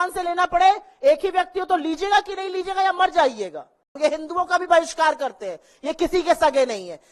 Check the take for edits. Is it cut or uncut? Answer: cut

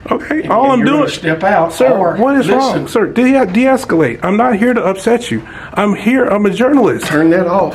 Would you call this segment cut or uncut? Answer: uncut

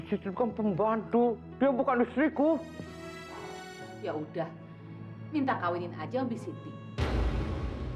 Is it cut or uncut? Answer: uncut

